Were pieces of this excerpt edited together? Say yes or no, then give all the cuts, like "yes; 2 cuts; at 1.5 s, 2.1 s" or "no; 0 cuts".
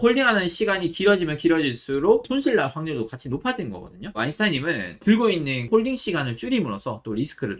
yes; 2 cuts; at 4.1 s, 5.6 s